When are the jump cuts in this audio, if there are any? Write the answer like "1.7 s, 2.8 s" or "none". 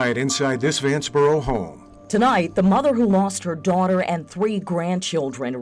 none